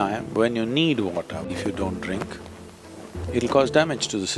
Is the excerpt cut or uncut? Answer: cut